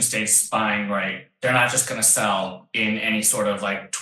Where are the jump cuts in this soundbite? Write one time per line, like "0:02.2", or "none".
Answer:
0:02.6